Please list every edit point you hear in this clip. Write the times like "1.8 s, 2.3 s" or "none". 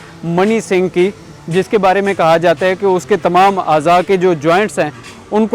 none